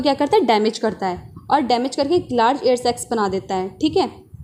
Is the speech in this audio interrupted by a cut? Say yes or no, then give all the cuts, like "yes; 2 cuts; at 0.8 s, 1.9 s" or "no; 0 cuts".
no; 0 cuts